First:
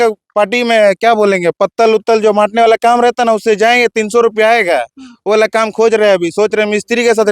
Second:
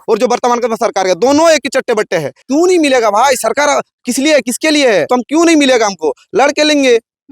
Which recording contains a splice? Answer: second; 2 cuts; at 2.4 s, 5.1 s

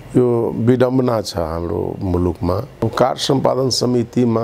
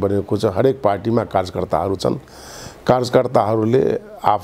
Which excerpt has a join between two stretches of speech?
first; 1 cut; at 2.7 s

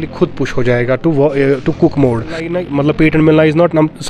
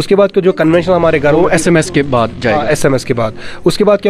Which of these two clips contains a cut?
first; 1 cut; at 2.5 s

